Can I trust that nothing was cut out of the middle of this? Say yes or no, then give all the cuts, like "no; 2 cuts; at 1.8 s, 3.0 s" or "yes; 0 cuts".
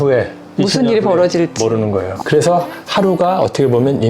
no; 1 cut; at 2.2 s